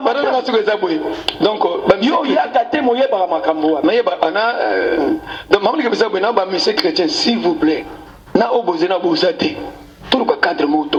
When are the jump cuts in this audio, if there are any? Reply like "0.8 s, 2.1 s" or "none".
none